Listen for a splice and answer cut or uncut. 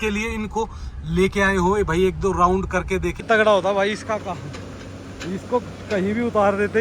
cut